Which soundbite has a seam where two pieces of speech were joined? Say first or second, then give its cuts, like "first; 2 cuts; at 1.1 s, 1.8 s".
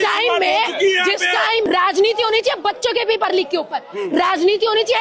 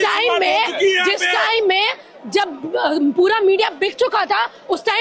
first; 1 cut; at 1.6 s